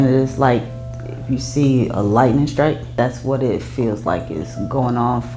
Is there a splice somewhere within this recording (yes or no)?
yes